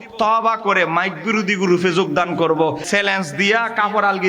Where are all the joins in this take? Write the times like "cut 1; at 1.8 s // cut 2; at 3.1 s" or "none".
cut 1; at 2.8 s